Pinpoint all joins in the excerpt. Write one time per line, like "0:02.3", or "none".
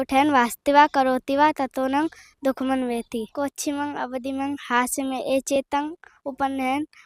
0:03.3